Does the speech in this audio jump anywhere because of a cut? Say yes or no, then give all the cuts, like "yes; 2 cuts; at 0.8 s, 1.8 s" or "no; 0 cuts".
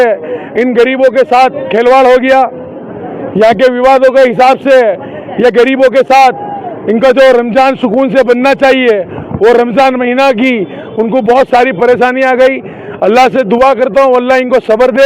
no; 0 cuts